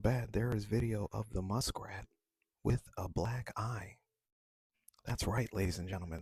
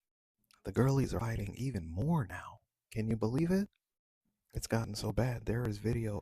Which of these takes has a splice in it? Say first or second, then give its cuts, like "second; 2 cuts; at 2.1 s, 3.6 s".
second; 1 cut; at 1.2 s